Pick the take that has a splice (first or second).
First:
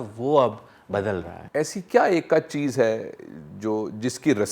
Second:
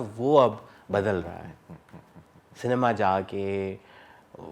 first